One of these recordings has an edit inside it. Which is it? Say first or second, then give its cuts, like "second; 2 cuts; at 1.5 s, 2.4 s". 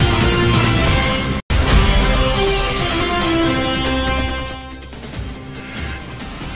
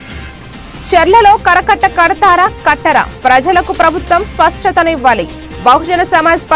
first; 1 cut; at 1.1 s